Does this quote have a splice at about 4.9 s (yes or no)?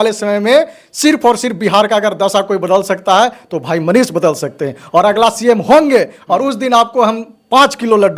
no